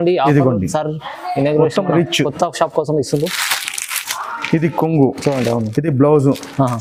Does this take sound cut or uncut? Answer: uncut